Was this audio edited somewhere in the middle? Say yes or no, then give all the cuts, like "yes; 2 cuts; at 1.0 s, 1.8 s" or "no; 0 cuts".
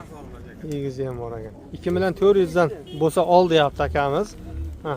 yes; 1 cut; at 1.6 s